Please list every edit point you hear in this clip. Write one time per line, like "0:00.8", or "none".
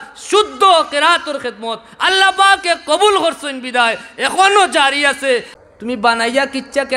0:05.5